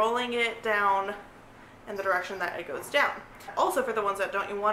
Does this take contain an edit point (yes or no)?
yes